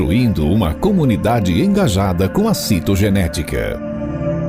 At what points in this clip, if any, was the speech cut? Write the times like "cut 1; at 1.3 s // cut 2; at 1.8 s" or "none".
none